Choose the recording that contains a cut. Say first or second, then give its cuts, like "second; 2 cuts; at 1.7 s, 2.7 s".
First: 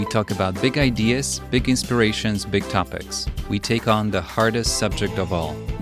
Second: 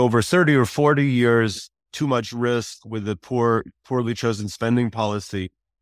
second; 1 cut; at 1.9 s